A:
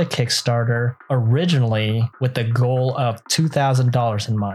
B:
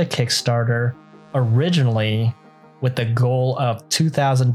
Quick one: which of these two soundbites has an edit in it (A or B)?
A